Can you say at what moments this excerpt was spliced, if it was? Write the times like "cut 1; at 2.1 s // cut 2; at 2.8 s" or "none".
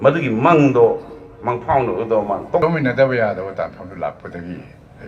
cut 1; at 2.6 s